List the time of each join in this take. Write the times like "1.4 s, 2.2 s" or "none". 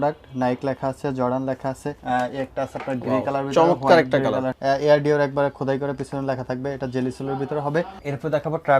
2.0 s, 4.5 s, 8.0 s